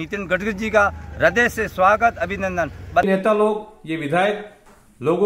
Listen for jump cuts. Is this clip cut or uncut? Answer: cut